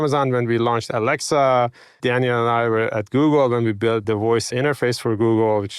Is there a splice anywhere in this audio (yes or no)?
yes